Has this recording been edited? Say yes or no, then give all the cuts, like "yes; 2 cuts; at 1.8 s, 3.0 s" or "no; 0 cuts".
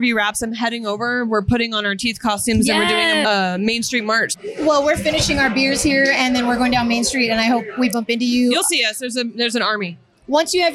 yes; 2 cuts; at 3.2 s, 4.3 s